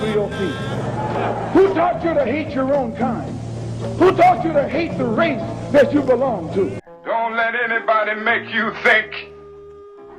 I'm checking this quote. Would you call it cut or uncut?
cut